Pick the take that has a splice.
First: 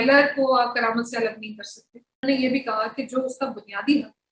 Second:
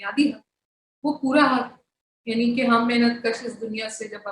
first; 1 cut; at 2.2 s

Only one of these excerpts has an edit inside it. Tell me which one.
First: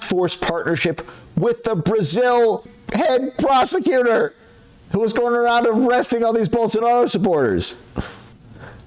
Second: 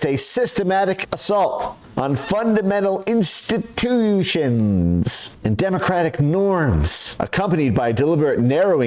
second; 2 cuts; at 5.2 s, 7.0 s

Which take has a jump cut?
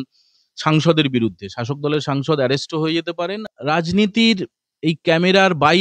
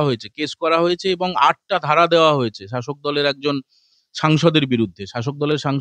first; 1 cut; at 3.4 s

